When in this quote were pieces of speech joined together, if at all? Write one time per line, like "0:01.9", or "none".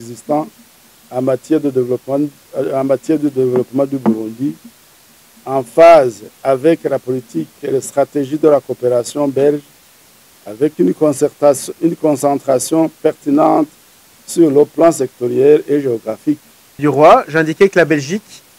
0:16.8

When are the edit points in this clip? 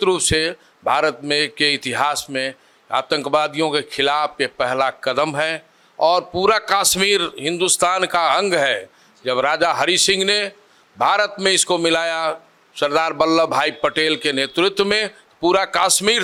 none

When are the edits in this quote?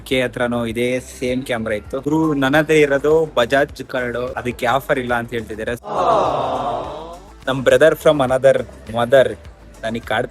0:02.0
0:04.3
0:07.3

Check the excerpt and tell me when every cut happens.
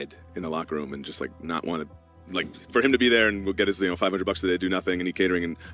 none

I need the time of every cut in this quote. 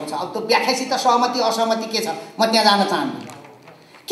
none

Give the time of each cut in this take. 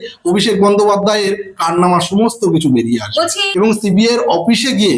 0:03.4

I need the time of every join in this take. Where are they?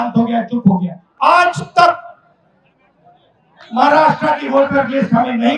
0:01.0

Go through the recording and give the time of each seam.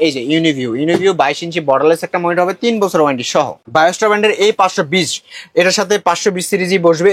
0:03.6

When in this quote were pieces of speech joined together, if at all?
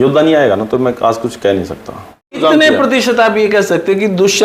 0:02.4

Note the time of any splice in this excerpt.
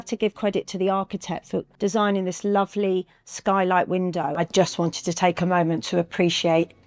0:04.4

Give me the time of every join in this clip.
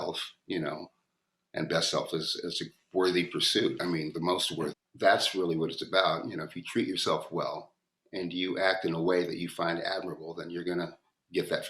0:04.8

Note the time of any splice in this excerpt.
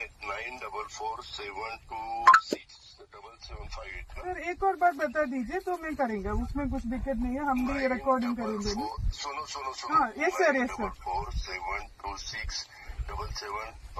none

